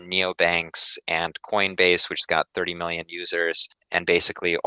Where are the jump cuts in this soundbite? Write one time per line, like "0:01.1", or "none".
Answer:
0:03.7